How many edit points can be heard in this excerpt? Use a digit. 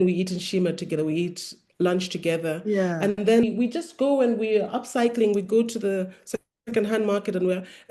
1